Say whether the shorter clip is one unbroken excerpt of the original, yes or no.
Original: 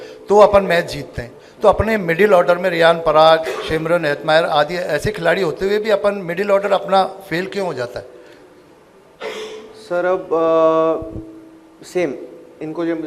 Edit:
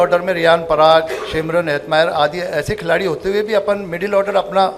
yes